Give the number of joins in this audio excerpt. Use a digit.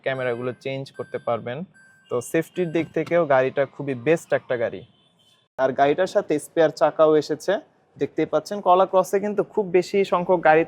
1